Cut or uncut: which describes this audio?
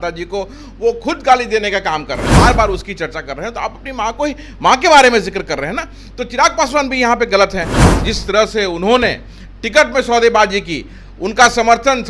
cut